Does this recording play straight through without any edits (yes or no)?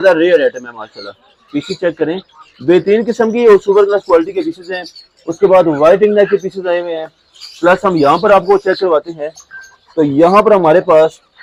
yes